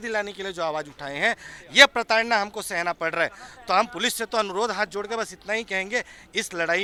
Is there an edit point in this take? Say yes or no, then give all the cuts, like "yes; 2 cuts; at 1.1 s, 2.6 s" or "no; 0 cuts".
no; 0 cuts